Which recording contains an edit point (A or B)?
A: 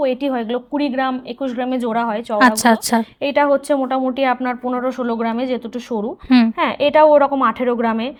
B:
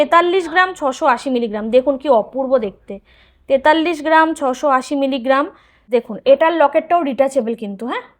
B